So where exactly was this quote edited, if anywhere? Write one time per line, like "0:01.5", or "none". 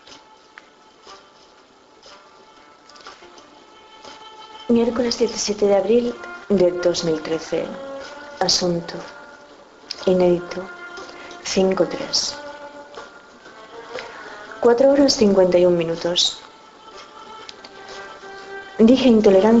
0:03.9